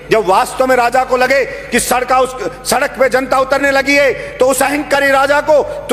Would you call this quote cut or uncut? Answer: uncut